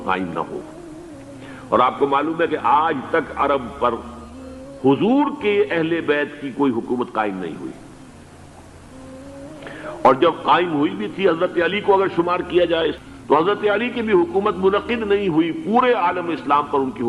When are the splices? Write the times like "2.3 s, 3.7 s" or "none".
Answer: 13.0 s